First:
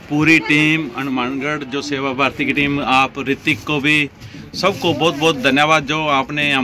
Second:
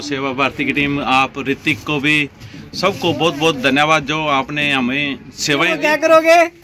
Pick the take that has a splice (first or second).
second